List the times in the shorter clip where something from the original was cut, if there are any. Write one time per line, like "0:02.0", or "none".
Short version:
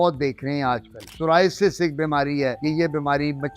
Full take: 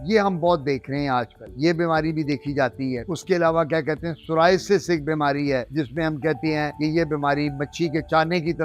0:01.0
0:02.6